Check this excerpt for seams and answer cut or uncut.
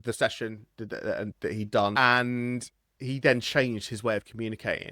cut